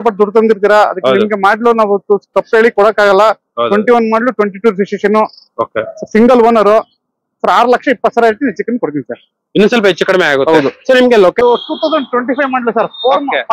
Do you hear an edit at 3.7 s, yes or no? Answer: no